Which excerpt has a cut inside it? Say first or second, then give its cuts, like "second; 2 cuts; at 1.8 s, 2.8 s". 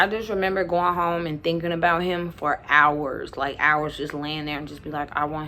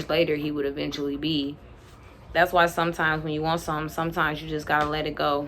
second; 1 cut; at 1.6 s